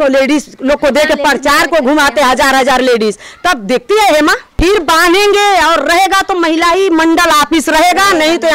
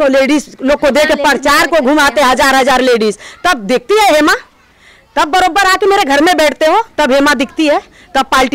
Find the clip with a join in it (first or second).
first